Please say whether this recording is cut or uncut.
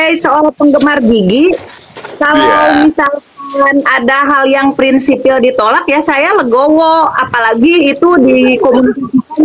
uncut